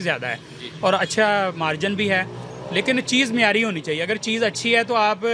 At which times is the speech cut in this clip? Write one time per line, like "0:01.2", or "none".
none